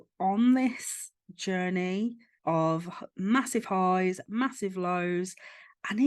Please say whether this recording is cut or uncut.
cut